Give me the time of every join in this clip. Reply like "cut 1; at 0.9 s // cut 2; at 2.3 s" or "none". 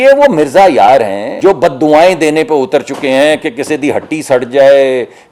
cut 1; at 1.2 s